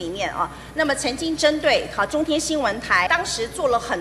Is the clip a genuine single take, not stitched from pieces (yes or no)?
no